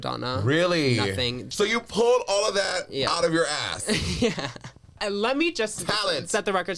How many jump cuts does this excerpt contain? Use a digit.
2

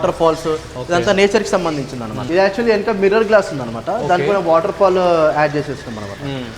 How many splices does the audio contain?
1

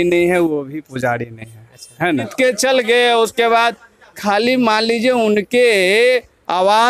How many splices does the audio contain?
1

